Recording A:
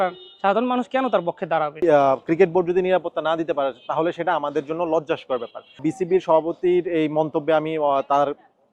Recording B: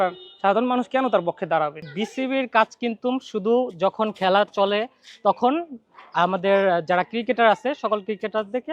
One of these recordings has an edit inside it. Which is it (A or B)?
A